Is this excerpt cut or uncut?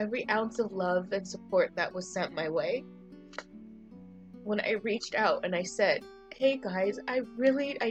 uncut